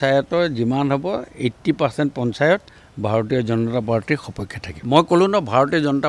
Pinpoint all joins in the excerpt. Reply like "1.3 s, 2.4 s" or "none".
none